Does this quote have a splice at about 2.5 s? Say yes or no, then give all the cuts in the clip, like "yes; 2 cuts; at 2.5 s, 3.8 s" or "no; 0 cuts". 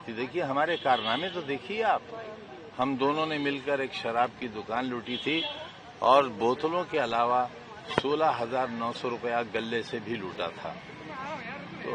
no; 0 cuts